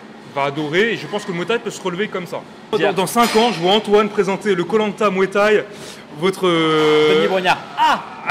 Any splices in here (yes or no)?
yes